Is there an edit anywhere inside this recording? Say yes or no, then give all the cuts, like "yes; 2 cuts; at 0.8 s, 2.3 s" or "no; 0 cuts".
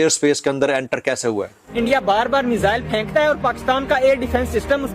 yes; 1 cut; at 1.6 s